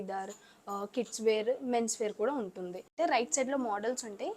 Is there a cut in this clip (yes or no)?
yes